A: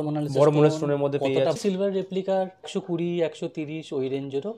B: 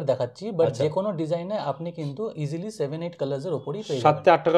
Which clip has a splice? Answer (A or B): A